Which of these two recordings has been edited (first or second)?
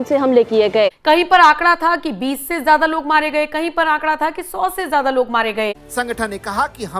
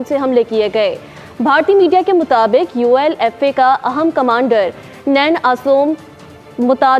first